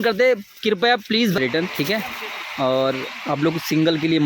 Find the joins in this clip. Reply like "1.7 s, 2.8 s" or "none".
1.4 s